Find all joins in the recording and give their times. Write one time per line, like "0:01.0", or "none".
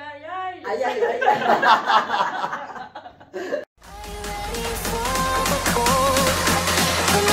none